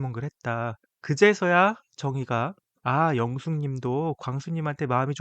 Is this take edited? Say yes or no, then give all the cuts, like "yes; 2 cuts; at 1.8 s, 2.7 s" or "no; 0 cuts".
yes; 2 cuts; at 0.9 s, 2.7 s